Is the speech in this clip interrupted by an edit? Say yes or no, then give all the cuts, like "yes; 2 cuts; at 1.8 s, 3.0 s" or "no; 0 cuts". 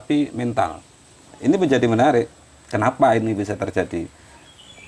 yes; 1 cut; at 1.3 s